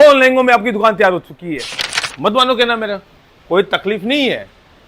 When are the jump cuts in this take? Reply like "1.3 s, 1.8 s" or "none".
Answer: 1.6 s

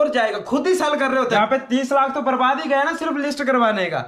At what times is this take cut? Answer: 1.2 s

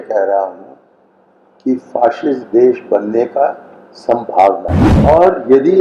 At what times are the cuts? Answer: 4.8 s

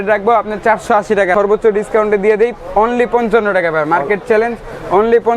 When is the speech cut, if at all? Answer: 1.3 s

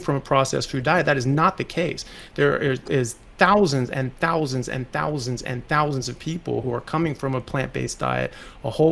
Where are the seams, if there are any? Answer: none

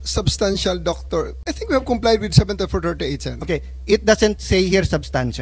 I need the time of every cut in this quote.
1.6 s

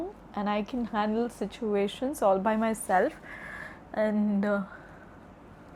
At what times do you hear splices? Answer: none

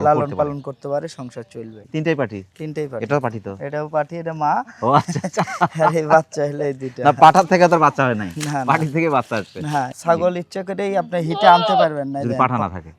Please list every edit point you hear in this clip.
1.8 s, 9.9 s

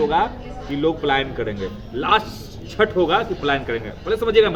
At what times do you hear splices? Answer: none

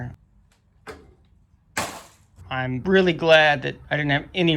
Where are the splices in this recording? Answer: 2.5 s

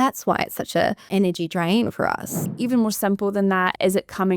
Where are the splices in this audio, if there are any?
1.0 s, 2.4 s

